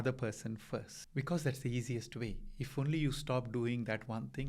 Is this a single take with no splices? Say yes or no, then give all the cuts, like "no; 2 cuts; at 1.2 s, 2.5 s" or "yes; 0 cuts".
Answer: no; 1 cut; at 1.0 s